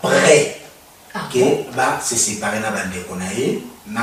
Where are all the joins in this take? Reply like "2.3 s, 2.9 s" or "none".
none